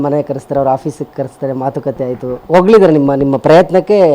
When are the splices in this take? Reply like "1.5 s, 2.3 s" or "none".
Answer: 2.4 s